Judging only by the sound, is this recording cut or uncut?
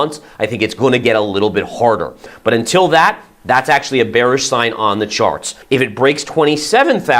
cut